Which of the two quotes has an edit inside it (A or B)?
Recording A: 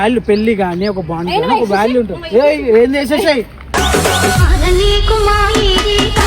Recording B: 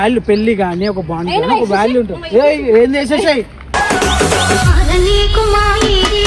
A